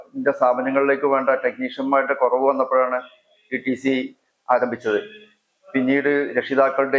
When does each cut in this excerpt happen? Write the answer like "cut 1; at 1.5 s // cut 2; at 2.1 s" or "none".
none